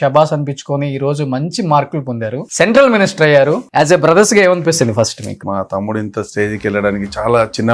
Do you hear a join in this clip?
yes; 3 cuts; at 2.4 s, 3.6 s, 5.5 s

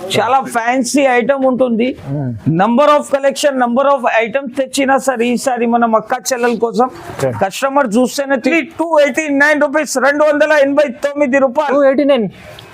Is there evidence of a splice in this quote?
yes; 1 cut; at 8.5 s

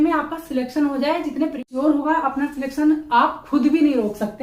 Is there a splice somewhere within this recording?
yes; 1 cut; at 1.6 s

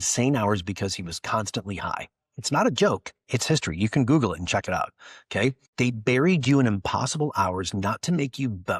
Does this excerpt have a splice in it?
yes; 1 cut; at 5.6 s

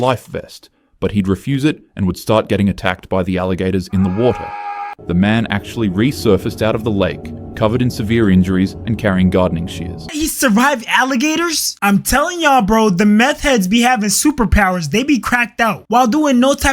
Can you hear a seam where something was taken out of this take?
yes; 3 cuts; at 4.9 s, 10.1 s, 15.8 s

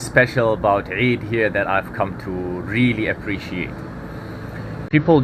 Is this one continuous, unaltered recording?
yes; 0 cuts

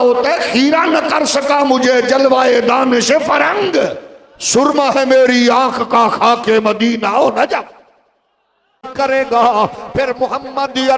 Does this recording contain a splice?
yes; 1 cut; at 8.8 s

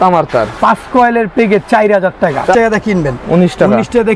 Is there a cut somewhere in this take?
yes; 1 cut; at 2.5 s

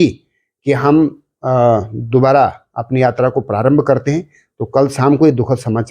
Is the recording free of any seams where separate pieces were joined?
yes; 0 cuts

